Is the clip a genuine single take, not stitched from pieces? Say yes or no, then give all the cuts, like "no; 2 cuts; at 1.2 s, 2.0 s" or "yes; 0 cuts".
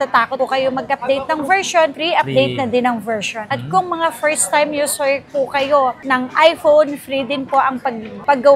yes; 0 cuts